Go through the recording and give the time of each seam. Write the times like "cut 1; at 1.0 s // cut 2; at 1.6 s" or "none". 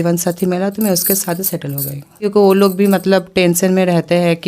cut 1; at 2.3 s

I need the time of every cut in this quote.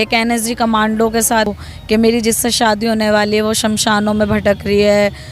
cut 1; at 1.5 s

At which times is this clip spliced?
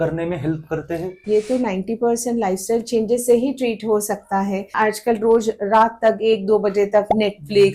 cut 1; at 4.7 s

